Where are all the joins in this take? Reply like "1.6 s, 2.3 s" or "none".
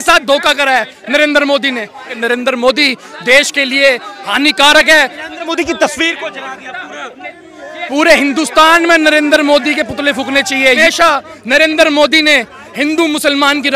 2.1 s, 5.2 s, 10.8 s